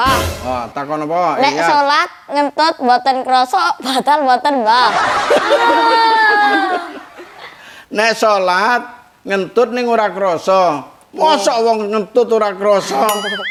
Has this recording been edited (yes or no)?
no